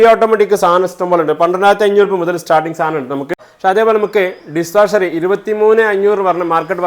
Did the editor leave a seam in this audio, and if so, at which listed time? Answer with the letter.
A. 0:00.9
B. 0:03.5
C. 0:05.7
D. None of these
B